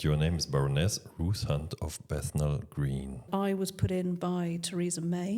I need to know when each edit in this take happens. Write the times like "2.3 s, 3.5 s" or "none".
3.3 s